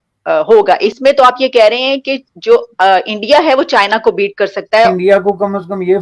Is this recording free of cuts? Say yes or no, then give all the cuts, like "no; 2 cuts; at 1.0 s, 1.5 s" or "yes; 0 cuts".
no; 2 cuts; at 1.0 s, 4.9 s